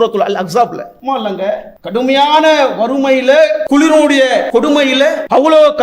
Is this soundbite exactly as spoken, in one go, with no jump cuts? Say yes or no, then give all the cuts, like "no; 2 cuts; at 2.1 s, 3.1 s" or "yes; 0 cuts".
no; 4 cuts; at 0.9 s, 1.7 s, 3.6 s, 4.6 s